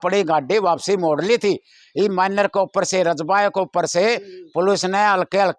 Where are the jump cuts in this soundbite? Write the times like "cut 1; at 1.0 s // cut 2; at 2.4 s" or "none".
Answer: none